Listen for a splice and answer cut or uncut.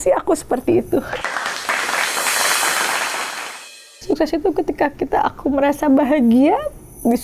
cut